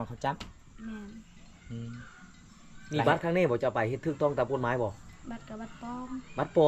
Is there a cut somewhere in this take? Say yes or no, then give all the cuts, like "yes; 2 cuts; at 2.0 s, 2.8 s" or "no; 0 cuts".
no; 0 cuts